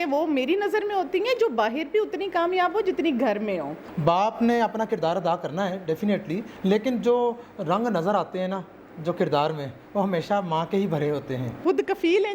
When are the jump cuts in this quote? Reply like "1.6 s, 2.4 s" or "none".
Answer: 3.8 s, 6.5 s, 11.5 s